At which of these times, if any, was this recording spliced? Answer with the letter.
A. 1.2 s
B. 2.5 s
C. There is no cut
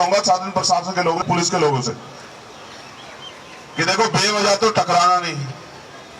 A